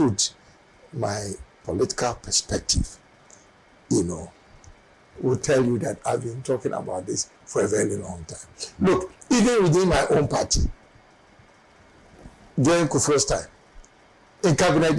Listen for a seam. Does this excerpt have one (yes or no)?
no